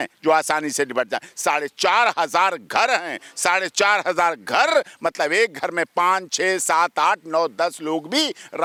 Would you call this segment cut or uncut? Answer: uncut